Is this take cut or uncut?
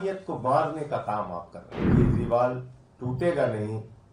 cut